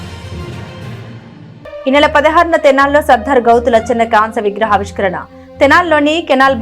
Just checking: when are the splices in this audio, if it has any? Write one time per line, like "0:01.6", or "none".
0:01.4